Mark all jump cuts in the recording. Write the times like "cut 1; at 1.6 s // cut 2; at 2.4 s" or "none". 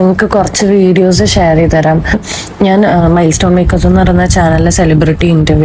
none